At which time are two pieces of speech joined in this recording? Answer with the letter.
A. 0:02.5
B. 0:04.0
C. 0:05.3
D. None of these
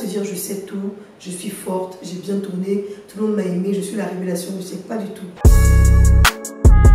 C